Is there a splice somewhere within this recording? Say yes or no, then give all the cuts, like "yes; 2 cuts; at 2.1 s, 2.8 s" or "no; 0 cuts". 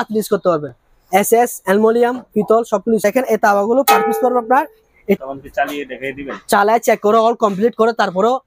yes; 2 cuts; at 3.0 s, 5.2 s